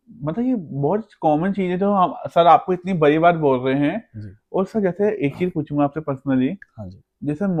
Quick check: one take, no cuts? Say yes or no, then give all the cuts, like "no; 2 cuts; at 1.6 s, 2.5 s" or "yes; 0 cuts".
yes; 0 cuts